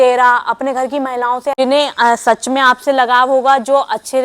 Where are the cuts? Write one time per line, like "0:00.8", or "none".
0:01.6